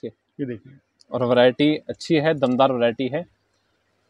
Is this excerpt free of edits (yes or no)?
yes